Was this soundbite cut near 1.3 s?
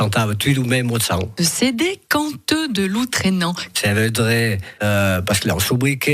yes; 2 cuts; at 1.3 s, 3.7 s

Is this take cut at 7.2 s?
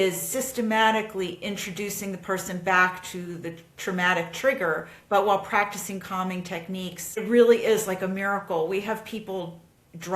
yes; 1 cut; at 7.2 s

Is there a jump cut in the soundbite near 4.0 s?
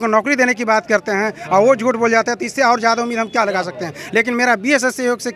no; 0 cuts

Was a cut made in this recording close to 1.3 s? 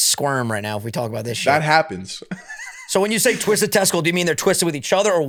no; 0 cuts

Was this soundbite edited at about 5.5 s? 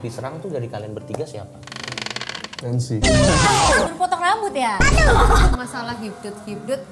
yes; 3 cuts; at 2.5 s, 3.9 s, 5.5 s

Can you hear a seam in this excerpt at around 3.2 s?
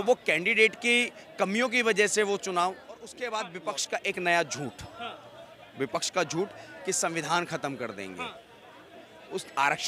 yes; 1 cut; at 3.2 s

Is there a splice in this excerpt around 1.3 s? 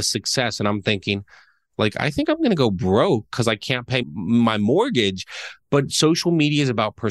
no; 0 cuts

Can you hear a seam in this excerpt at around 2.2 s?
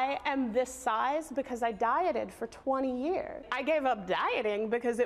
no; 1 cut; at 3.5 s

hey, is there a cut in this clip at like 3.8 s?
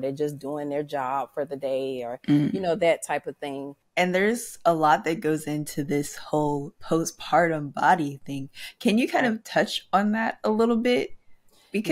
yes; 1 cut; at 3.8 s

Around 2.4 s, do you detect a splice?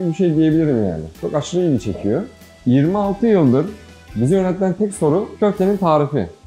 yes; 1 cut; at 2.4 s

